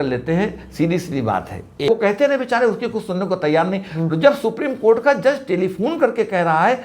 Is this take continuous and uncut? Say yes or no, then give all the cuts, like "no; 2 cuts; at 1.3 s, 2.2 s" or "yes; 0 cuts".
no; 1 cut; at 1.9 s